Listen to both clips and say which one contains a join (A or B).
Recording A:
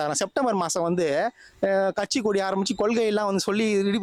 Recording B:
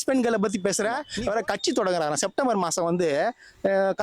B